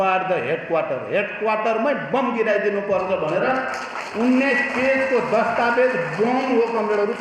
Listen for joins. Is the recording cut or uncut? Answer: uncut